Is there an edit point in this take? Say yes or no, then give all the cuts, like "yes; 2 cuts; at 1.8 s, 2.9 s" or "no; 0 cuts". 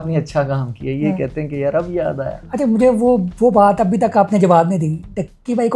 no; 0 cuts